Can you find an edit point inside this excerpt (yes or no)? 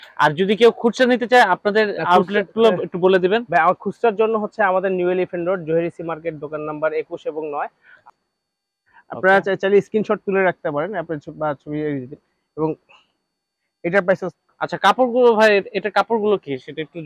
yes